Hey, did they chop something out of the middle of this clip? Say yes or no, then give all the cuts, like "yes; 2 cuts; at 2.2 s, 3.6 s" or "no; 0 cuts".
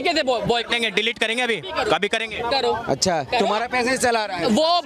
no; 0 cuts